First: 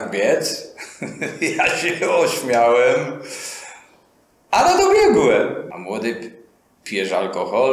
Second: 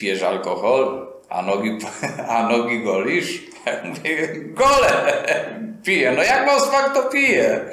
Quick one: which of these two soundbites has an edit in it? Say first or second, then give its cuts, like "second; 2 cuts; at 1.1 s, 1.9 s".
first; 1 cut; at 5.7 s